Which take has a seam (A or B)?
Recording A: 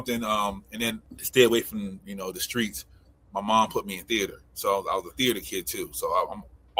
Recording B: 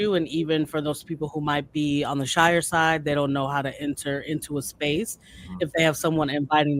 A